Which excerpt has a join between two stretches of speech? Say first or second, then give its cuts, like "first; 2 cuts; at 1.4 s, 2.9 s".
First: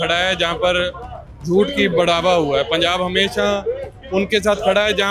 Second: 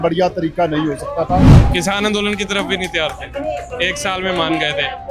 second; 1 cut; at 1.5 s